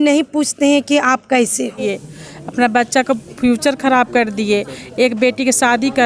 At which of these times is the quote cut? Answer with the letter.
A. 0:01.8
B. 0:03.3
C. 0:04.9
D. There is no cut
A